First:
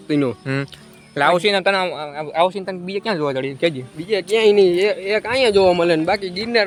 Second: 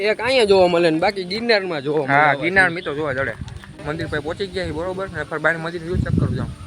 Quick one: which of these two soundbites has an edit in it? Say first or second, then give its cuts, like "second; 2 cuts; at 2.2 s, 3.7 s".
second; 1 cut; at 3.8 s